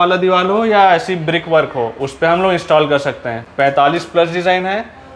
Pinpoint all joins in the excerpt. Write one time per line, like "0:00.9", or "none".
none